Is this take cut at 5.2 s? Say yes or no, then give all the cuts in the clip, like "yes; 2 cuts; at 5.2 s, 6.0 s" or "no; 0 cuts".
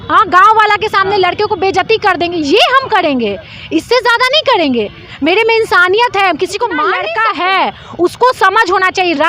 no; 1 cut; at 7.0 s